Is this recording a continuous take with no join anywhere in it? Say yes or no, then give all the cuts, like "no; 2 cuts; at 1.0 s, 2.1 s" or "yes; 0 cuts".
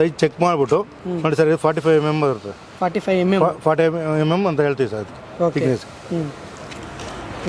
yes; 0 cuts